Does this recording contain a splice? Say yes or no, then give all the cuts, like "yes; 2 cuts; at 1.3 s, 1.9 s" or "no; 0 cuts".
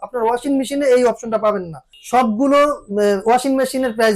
yes; 1 cut; at 1.9 s